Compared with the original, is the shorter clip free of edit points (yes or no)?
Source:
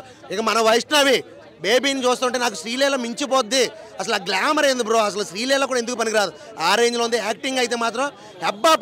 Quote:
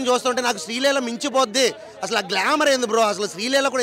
yes